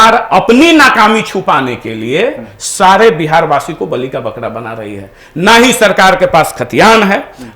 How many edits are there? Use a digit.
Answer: 0